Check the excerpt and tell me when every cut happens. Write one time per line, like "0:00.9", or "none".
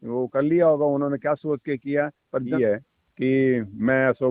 0:02.5